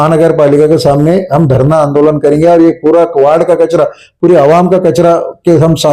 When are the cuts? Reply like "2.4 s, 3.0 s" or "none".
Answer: none